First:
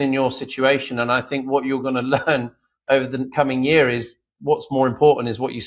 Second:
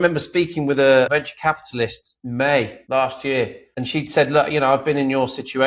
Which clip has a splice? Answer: second; 4 cuts; at 1.1 s, 2.1 s, 2.8 s, 3.6 s

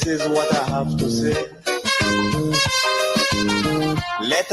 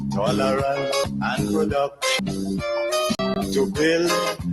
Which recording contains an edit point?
second; 3 cuts; at 1.0 s, 2.2 s, 3.2 s

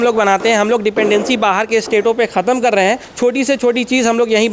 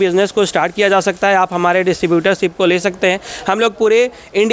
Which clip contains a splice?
first; 1 cut; at 3.1 s

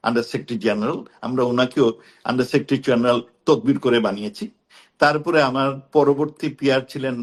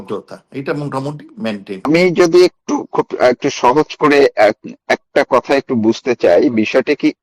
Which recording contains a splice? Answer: second; 1 cut; at 1.9 s

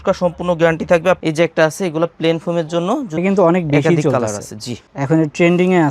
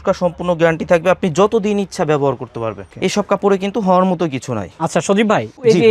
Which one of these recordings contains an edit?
first; 2 cuts; at 1.2 s, 3.2 s

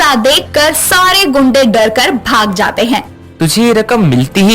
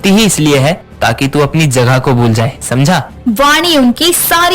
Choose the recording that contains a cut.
first; 1 cut; at 3.3 s

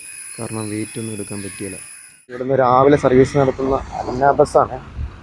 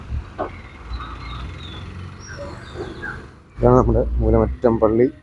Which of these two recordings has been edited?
first; 1 cut; at 2.5 s

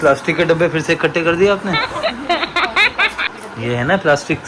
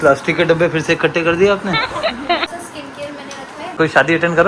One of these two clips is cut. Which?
second; 2 cuts; at 2.5 s, 3.7 s

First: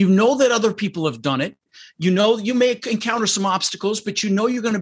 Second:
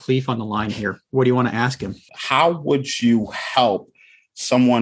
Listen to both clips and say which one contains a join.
second; 1 cut; at 2.1 s

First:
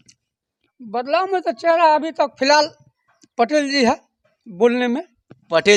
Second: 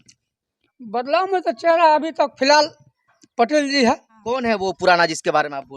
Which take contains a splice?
second; 1 cut; at 4.1 s

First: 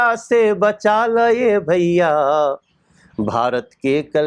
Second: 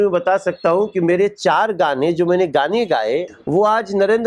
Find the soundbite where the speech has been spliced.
second; 1 cut; at 3.4 s

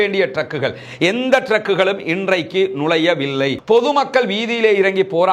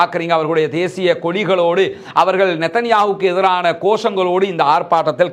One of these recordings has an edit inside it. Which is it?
first; 1 cut; at 3.6 s

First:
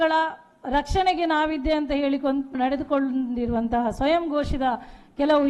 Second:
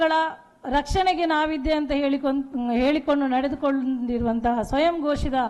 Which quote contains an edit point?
first; 1 cut; at 2.5 s

